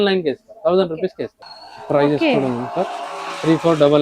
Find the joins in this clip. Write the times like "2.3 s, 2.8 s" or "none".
1.3 s